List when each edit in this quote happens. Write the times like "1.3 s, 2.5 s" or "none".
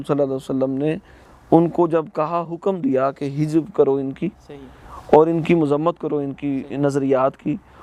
none